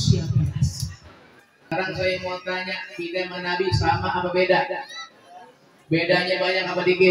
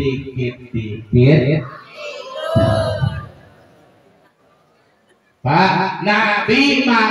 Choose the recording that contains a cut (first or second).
first